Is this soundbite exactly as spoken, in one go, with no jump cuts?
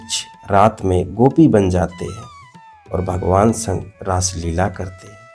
yes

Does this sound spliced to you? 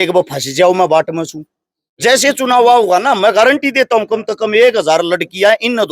no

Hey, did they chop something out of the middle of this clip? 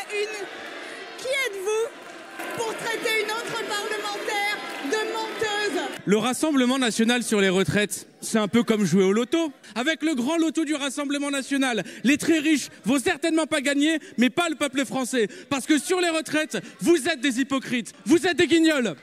yes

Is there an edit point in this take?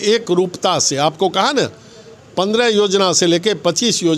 no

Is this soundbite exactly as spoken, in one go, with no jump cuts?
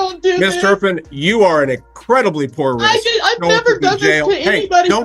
yes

